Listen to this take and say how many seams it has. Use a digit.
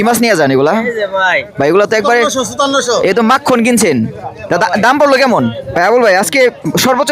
1